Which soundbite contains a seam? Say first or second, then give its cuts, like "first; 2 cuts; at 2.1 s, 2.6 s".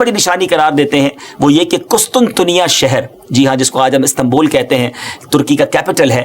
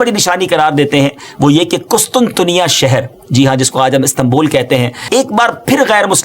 second; 1 cut; at 5.0 s